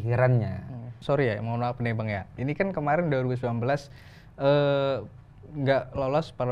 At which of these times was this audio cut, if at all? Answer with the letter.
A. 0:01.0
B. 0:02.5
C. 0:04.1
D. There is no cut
A